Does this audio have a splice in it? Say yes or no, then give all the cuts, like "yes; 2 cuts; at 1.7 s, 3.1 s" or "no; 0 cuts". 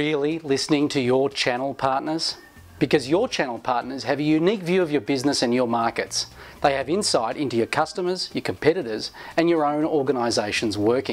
yes; 1 cut; at 4.9 s